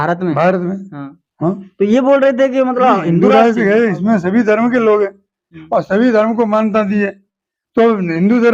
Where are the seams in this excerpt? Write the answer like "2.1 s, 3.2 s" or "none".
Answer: 3.2 s